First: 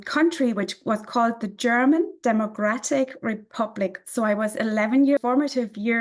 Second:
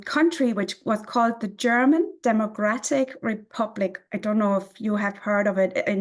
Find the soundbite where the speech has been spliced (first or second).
first